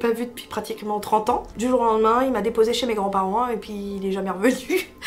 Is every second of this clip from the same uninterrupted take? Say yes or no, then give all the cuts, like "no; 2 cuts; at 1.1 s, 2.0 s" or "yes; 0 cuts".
no; 1 cut; at 1.5 s